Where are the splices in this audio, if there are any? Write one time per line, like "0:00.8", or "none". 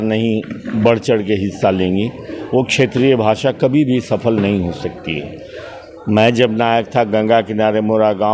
none